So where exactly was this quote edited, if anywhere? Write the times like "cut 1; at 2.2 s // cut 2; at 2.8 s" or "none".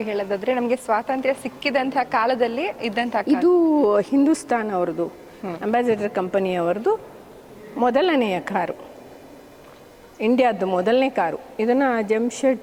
none